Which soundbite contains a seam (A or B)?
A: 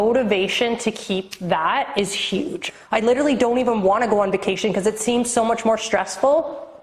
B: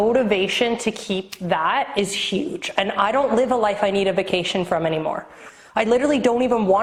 A